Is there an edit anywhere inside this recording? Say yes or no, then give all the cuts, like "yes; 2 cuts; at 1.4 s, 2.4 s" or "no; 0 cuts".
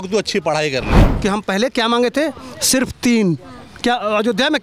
yes; 1 cut; at 1.1 s